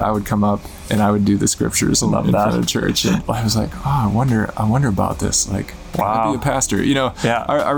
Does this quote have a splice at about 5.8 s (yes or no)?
no